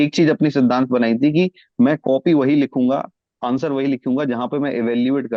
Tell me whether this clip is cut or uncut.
uncut